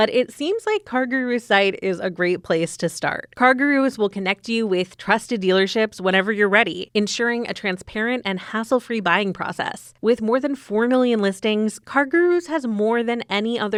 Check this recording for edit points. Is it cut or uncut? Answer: uncut